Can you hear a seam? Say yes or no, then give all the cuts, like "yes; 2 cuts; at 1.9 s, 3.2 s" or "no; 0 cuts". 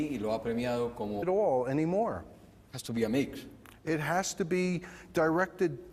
no; 0 cuts